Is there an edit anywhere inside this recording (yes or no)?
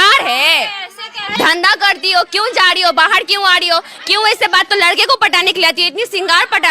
yes